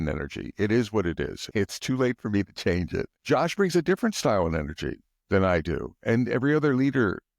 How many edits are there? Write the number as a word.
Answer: two